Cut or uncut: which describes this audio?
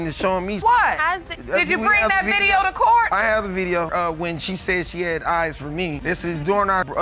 uncut